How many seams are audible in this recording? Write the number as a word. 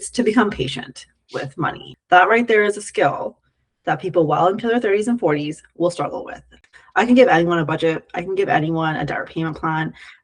two